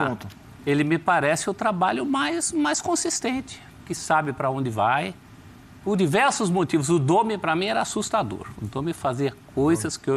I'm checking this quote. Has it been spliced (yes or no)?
no